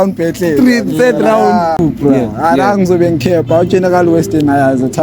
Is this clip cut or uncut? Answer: cut